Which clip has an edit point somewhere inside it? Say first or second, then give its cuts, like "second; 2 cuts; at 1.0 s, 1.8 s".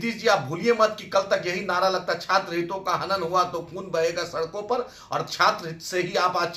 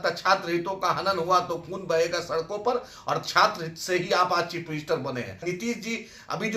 second; 1 cut; at 5.4 s